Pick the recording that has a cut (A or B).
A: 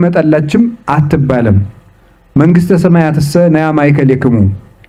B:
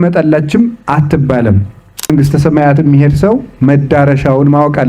B